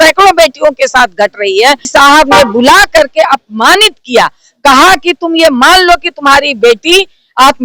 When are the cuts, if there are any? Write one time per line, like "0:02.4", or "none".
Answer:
0:01.9